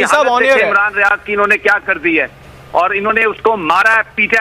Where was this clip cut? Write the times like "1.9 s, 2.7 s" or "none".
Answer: none